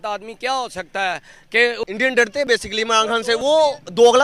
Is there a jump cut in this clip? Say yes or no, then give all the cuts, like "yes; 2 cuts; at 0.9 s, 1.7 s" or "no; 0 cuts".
yes; 1 cut; at 1.8 s